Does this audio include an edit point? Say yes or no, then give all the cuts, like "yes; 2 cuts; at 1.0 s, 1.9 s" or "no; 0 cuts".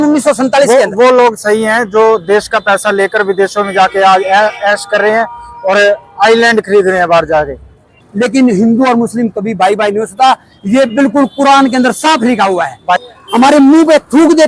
yes; 2 cuts; at 8.0 s, 13.0 s